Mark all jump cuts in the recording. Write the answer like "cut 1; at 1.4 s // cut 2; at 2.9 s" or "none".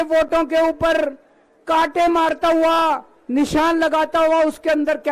none